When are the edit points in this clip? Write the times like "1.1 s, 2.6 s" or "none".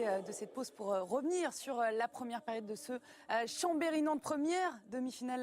2.6 s